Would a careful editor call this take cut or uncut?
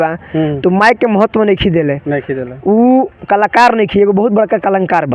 uncut